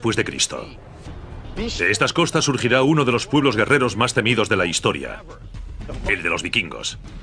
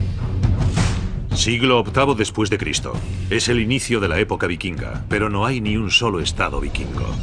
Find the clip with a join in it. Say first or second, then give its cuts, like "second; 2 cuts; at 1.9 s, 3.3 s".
second; 1 cut; at 4.7 s